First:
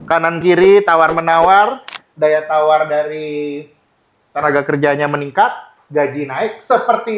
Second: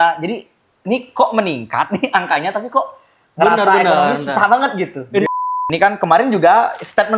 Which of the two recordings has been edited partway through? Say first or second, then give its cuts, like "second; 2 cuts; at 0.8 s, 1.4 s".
second; 1 cut; at 5.3 s